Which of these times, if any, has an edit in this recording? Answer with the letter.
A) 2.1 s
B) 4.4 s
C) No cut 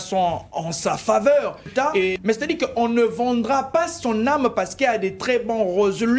A